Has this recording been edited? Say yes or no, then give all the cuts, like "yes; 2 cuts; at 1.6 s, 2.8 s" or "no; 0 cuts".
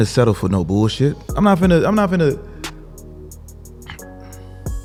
no; 0 cuts